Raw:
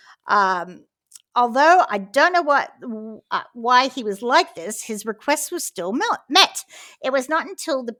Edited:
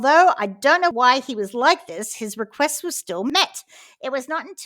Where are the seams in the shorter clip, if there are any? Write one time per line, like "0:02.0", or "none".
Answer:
0:00.9
0:03.1